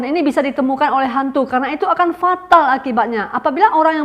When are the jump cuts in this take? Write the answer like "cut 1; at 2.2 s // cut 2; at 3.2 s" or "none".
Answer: none